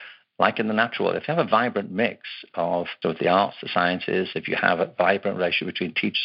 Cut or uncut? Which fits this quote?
cut